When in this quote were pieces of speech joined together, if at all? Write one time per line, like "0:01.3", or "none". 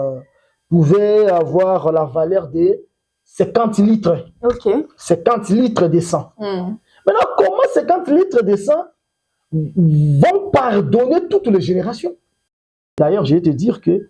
0:12.6